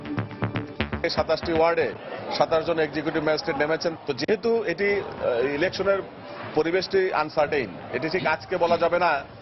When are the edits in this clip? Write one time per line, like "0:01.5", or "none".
0:00.9
0:03.9